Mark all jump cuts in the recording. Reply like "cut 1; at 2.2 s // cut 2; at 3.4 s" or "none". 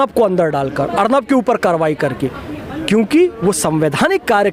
none

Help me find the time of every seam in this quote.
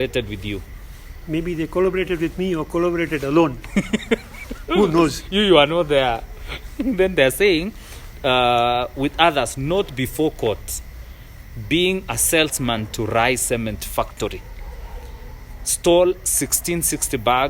none

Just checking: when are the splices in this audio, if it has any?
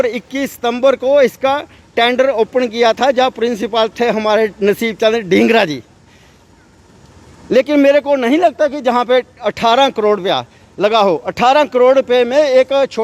none

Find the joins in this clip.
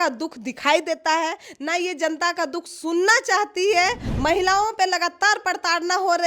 cut 1; at 4.1 s

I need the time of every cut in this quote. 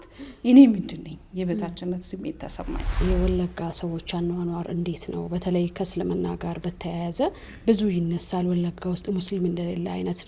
cut 1; at 3.0 s

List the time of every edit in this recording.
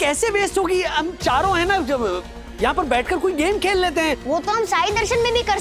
cut 1; at 4.2 s

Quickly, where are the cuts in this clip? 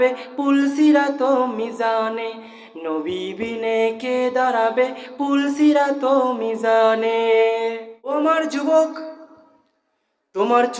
cut 1; at 8.1 s

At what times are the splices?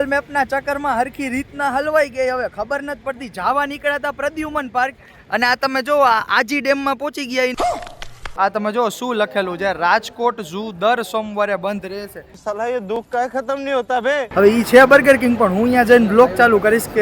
cut 1; at 8.2 s // cut 2; at 14.3 s

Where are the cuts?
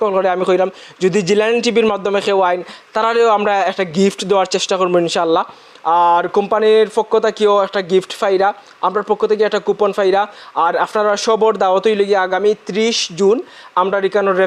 none

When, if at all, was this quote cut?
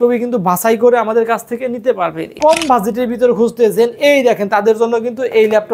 cut 1; at 2.3 s

